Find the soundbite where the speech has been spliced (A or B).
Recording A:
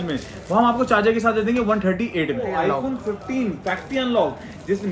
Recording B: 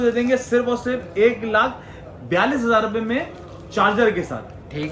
A